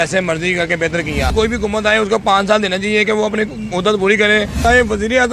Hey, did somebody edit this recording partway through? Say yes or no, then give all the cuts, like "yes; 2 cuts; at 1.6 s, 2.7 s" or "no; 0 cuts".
yes; 2 cuts; at 1.3 s, 4.6 s